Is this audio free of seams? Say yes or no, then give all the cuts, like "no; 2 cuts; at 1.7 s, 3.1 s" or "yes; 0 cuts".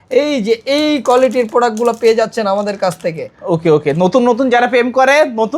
yes; 0 cuts